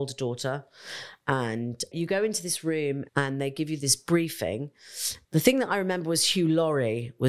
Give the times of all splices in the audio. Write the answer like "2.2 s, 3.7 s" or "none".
1.9 s, 3.0 s, 5.1 s